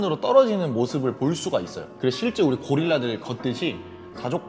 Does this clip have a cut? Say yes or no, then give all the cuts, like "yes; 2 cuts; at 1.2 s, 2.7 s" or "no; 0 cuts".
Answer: no; 0 cuts